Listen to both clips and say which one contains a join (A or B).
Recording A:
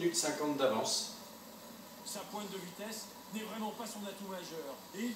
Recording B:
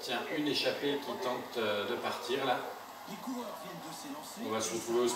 B